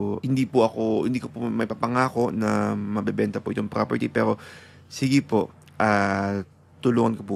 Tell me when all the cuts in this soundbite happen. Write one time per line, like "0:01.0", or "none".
none